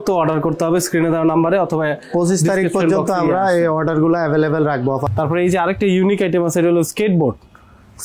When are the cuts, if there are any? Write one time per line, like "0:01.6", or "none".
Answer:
0:05.0